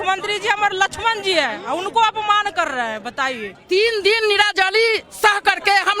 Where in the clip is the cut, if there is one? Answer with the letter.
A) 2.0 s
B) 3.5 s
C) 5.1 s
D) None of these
B